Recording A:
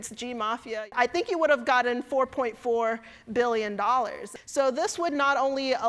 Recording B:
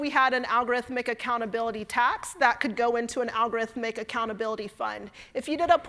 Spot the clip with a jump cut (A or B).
A